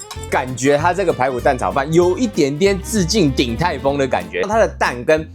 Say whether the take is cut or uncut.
cut